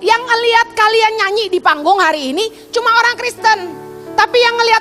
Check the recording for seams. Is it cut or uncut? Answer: uncut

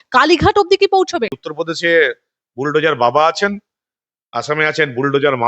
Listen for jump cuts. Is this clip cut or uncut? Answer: cut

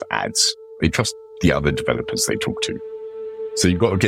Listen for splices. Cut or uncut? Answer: uncut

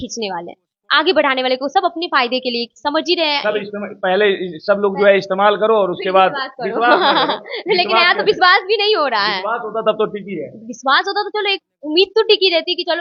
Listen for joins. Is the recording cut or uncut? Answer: uncut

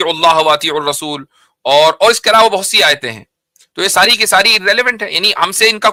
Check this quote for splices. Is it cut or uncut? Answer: uncut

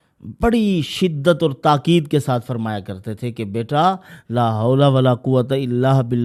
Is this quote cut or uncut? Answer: uncut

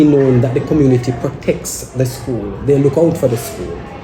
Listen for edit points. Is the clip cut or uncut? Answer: uncut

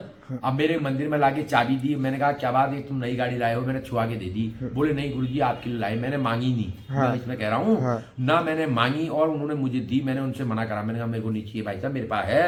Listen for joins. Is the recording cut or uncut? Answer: uncut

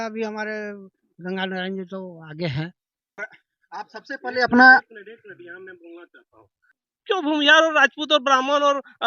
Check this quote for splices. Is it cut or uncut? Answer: cut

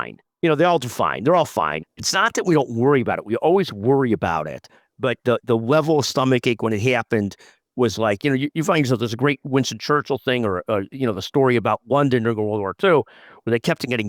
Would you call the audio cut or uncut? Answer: cut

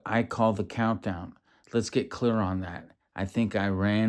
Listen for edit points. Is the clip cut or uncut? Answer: uncut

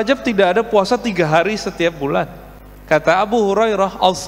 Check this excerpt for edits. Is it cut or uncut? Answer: uncut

